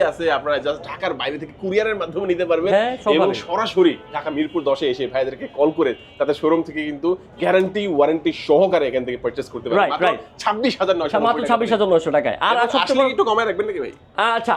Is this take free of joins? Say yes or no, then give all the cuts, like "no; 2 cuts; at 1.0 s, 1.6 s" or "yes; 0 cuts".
yes; 0 cuts